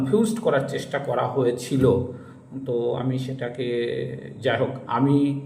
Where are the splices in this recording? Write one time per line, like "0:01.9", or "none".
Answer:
none